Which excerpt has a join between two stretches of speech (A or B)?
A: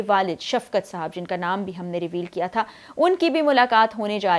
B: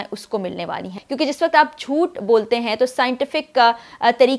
B